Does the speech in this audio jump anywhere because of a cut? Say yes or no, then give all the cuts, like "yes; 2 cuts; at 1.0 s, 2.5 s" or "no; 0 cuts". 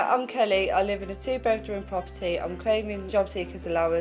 yes; 1 cut; at 3.0 s